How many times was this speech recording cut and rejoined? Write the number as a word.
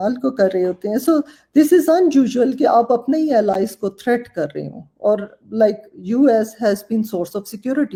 zero